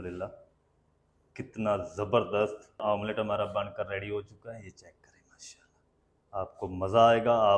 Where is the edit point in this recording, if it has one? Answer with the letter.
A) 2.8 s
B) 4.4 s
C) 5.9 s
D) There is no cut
A